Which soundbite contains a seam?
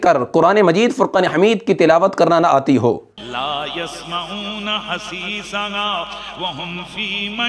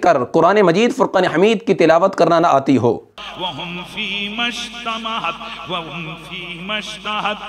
second; 1 cut; at 3.2 s

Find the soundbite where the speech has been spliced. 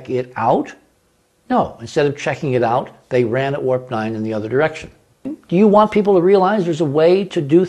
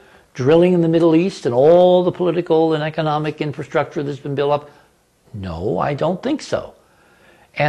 first; 1 cut; at 5.4 s

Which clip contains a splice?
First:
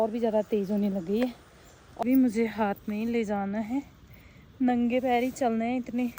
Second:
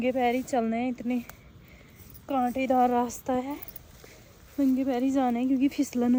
first; 1 cut; at 2.0 s

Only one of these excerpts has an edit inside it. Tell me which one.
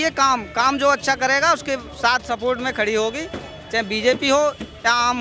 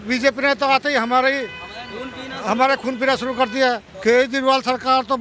second; 1 cut; at 3.9 s

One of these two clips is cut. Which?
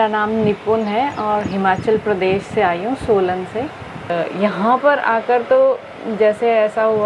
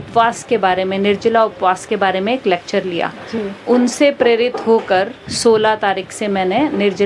first; 1 cut; at 4.1 s

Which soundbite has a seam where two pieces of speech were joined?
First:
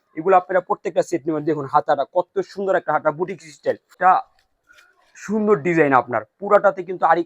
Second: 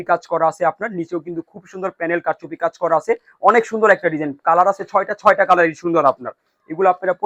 first; 1 cut; at 4.0 s

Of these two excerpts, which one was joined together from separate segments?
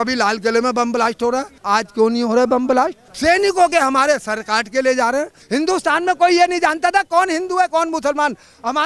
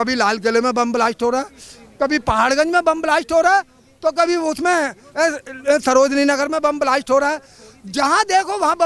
first; 3 cuts; at 1.5 s, 3.0 s, 5.4 s

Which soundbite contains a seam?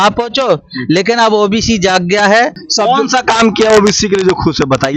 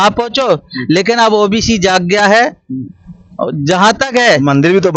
first; 1 cut; at 2.6 s

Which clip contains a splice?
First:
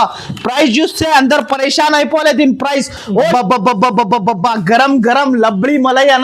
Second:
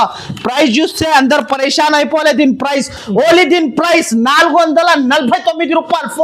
first; 1 cut; at 3.3 s

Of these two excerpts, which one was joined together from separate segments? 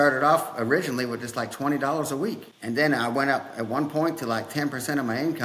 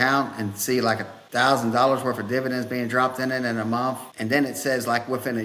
second; 2 cuts; at 1.1 s, 4.1 s

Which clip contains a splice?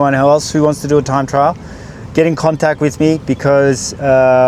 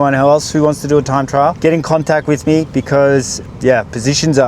second; 2 cuts; at 1.6 s, 3.4 s

